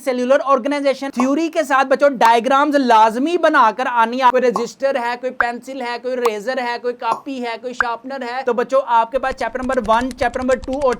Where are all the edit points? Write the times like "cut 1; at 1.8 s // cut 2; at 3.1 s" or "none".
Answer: cut 1; at 1.1 s // cut 2; at 4.3 s // cut 3; at 8.4 s

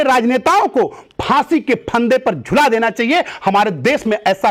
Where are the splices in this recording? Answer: none

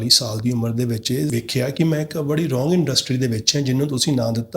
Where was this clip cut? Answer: cut 1; at 1.3 s

